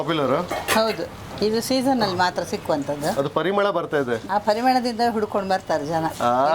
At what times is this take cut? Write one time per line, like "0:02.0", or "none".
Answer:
0:03.1
0:04.2